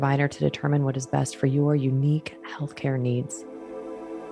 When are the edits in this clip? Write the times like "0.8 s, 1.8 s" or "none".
3.4 s